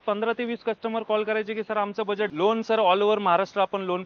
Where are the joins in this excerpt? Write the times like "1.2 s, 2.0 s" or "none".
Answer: 2.3 s